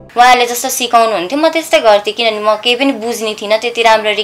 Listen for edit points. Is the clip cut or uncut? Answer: uncut